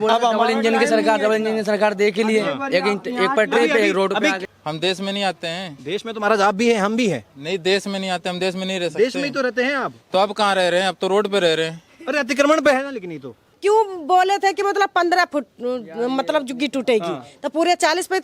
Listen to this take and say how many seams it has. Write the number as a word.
two